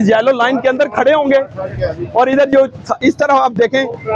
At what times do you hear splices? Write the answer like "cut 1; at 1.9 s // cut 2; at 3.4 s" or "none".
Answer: none